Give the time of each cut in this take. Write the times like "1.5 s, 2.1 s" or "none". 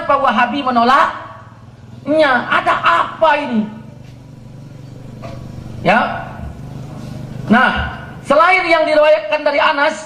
none